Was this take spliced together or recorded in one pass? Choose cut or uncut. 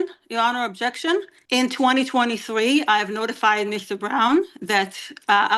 cut